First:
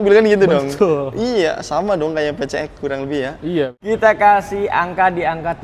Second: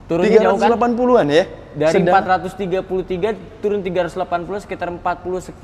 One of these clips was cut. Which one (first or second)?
first